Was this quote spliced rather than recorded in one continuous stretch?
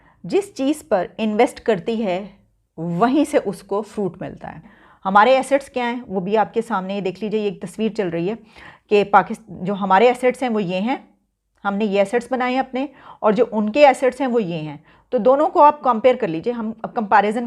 yes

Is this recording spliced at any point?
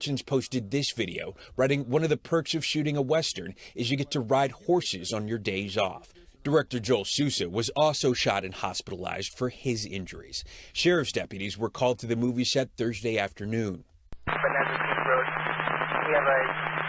yes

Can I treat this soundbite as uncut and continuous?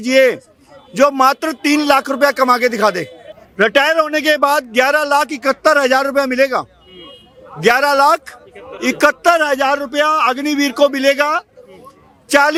yes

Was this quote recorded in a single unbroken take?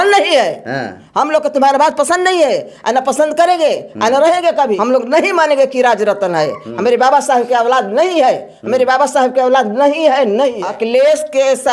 no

